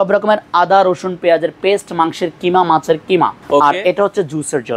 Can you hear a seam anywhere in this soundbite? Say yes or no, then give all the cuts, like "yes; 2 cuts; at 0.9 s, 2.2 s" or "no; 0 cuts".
yes; 1 cut; at 3.4 s